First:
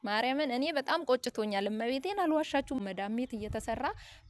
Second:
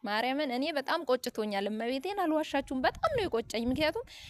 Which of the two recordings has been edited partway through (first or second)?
first